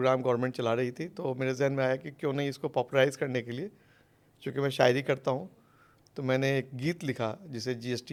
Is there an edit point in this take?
no; 0 cuts

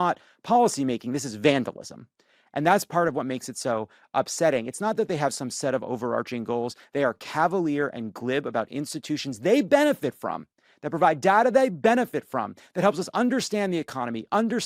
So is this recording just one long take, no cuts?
yes; 0 cuts

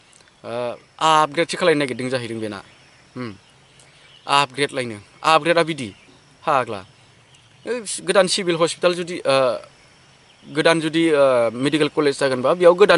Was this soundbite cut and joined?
no; 0 cuts

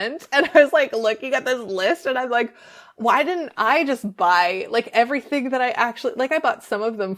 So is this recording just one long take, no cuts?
yes; 0 cuts

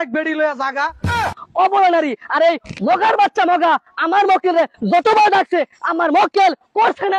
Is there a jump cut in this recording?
yes; 1 cut; at 1.4 s

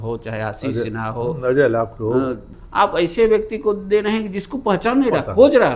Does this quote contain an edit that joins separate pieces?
yes; 1 cut; at 2.5 s

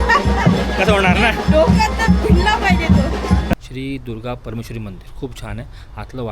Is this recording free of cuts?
no; 1 cut; at 3.5 s

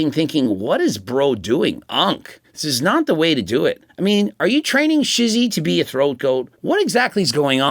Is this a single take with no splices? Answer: no; 2 cuts; at 3.9 s, 6.5 s

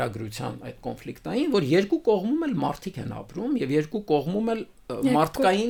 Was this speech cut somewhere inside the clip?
no; 0 cuts

